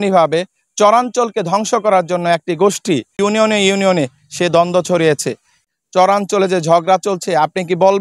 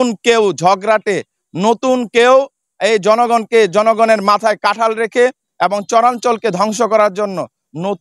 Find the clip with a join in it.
first; 2 cuts; at 3.1 s, 5.6 s

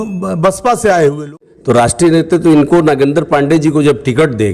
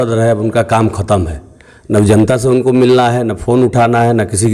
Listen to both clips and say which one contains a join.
first; 1 cut; at 1.2 s

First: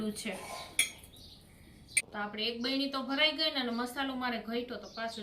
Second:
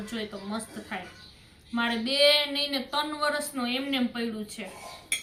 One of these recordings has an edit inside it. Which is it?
first; 1 cut; at 2.0 s

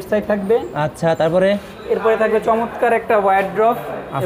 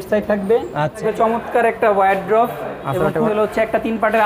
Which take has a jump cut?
second; 2 cuts; at 1.0 s, 3.3 s

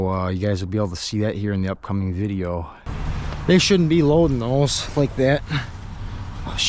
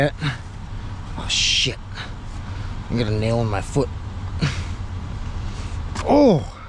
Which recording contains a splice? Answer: first; 1 cut; at 2.9 s

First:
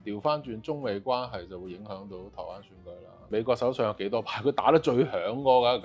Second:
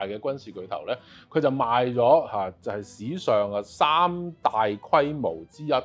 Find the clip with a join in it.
first; 1 cut; at 3.2 s

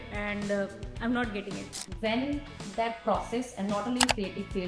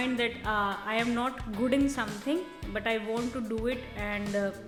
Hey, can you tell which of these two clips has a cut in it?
first; 1 cut; at 1.8 s

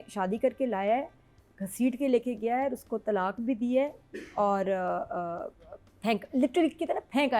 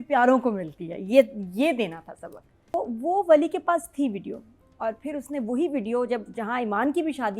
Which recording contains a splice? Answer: second; 1 cut; at 2.7 s

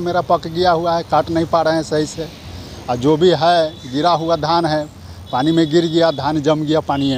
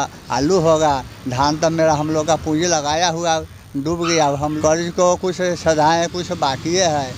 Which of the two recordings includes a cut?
second; 1 cut; at 4.6 s

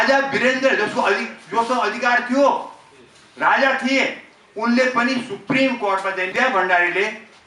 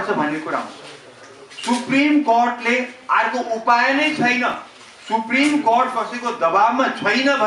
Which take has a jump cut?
first; 1 cut; at 6.3 s

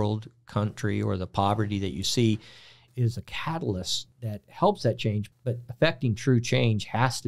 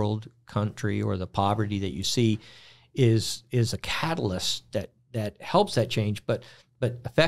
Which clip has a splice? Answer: first; 3 cuts; at 2.8 s, 4.0 s, 5.2 s

